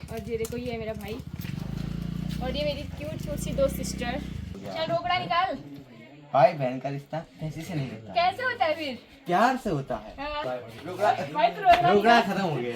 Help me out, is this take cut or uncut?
cut